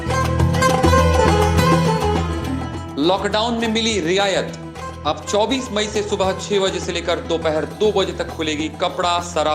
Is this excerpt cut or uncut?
cut